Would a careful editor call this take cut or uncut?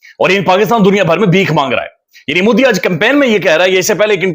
uncut